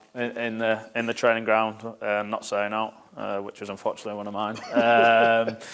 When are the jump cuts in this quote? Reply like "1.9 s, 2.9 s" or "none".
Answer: none